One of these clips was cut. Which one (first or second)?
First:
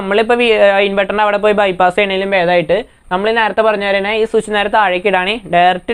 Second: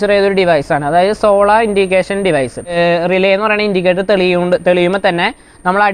second